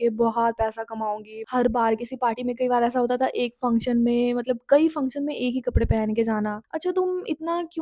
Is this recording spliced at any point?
yes; 2 cuts; at 1.3 s, 6.7 s

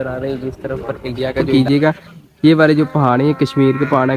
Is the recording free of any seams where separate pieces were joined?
no; 1 cut; at 1.5 s

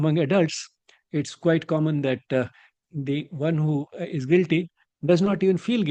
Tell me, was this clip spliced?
no; 0 cuts

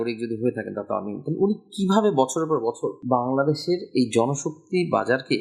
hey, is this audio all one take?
yes; 0 cuts

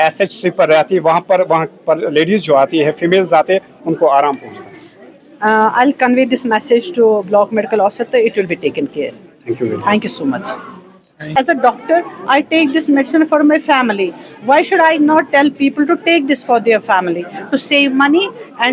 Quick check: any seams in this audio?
yes; 1 cut; at 11.3 s

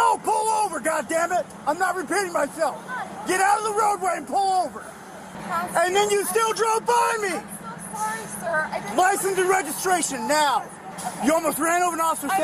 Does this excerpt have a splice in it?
yes; 2 cuts; at 5.4 s, 10.9 s

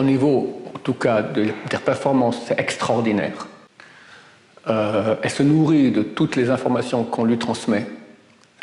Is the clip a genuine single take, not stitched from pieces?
yes; 0 cuts

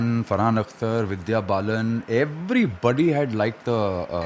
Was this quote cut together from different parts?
no; 0 cuts

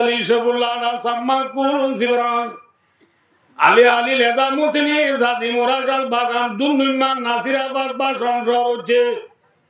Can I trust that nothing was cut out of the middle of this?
yes; 0 cuts

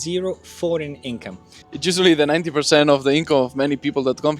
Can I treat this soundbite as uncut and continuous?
yes; 0 cuts

